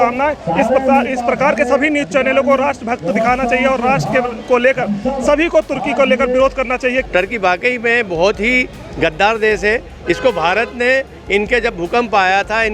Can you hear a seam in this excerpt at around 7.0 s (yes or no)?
yes